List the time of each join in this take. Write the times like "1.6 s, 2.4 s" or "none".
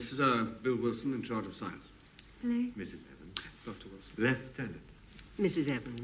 3.7 s

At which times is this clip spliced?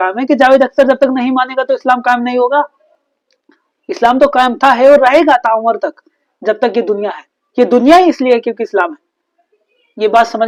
none

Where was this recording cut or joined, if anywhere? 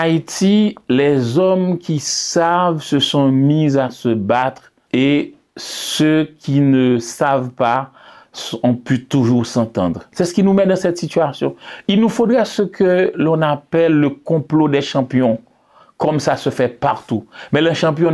4.7 s, 10.0 s

